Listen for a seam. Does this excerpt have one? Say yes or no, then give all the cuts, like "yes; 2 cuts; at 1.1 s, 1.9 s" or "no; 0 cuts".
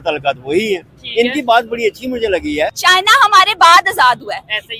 yes; 1 cut; at 2.8 s